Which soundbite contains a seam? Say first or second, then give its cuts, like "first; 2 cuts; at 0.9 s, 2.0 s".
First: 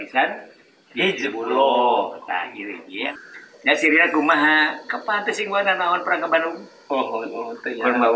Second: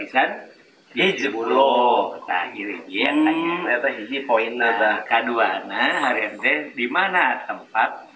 first; 1 cut; at 2.9 s